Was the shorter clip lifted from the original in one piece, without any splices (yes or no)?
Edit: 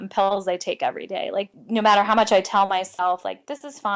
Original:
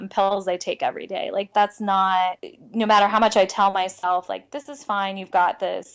no